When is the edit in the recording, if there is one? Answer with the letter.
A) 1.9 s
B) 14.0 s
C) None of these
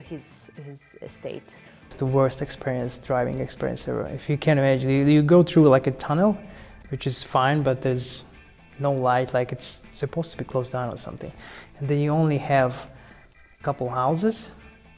A